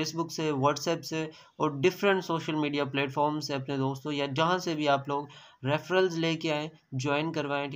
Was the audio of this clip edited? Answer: no; 0 cuts

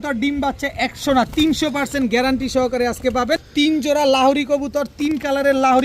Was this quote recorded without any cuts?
no; 1 cut; at 3.5 s

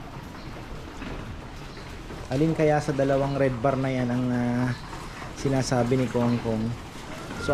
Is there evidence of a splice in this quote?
no; 0 cuts

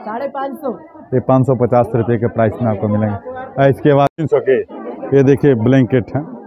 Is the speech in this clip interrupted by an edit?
yes; 1 cut; at 4.1 s

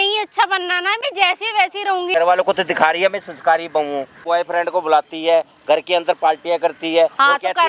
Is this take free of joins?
no; 2 cuts; at 2.1 s, 4.1 s

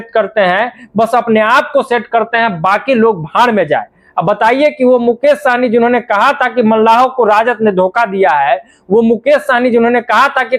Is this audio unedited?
yes; 0 cuts

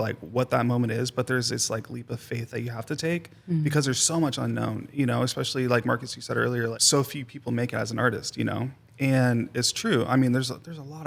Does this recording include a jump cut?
no; 0 cuts

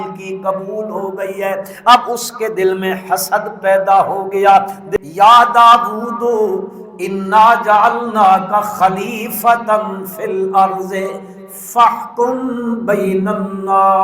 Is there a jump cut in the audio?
yes; 1 cut; at 4.8 s

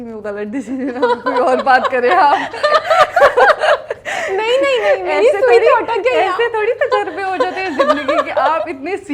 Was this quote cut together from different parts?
no; 0 cuts

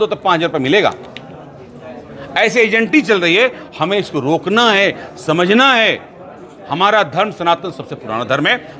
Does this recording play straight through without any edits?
yes; 0 cuts

